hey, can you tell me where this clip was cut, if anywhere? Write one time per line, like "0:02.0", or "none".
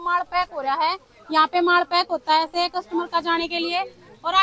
none